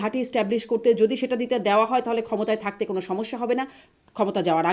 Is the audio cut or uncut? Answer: uncut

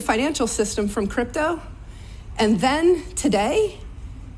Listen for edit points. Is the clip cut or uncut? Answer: cut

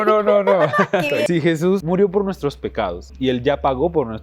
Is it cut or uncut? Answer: cut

